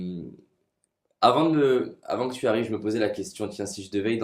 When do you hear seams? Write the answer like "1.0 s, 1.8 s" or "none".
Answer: none